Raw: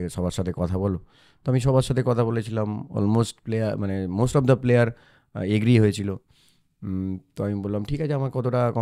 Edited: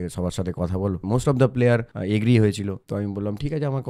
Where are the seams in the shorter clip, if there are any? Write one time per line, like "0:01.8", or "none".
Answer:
0:01.0
0:01.9
0:02.8